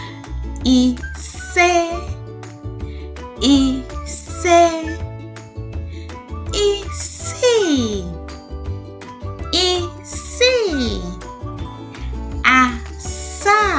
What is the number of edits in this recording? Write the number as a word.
zero